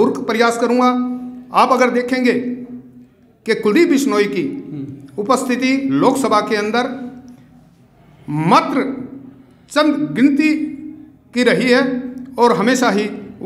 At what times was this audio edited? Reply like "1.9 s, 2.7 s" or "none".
none